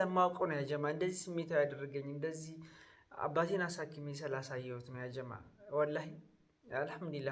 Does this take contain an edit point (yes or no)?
no